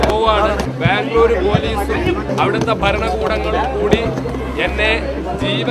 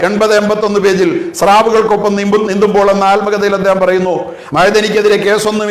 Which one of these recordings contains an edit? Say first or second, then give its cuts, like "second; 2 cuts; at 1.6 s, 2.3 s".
second; 1 cut; at 4.3 s